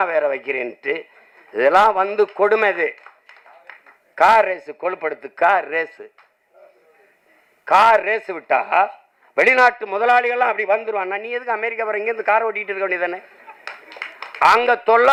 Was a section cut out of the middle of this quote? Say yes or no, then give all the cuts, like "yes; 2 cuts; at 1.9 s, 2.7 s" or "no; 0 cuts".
no; 0 cuts